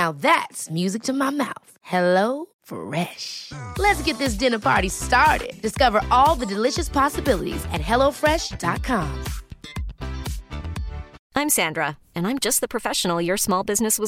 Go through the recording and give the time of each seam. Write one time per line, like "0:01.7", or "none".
0:11.2